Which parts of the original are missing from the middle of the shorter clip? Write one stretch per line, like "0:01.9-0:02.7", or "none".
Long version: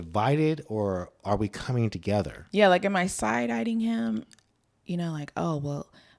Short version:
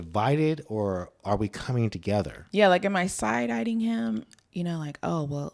0:04.4-0:04.7